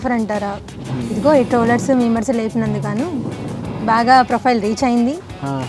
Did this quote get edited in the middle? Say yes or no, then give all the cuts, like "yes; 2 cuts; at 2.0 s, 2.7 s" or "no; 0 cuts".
no; 0 cuts